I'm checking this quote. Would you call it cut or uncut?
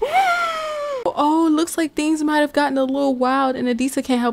cut